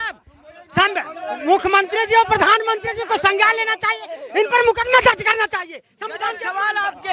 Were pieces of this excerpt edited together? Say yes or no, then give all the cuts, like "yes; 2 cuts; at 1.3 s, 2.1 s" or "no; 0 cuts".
no; 0 cuts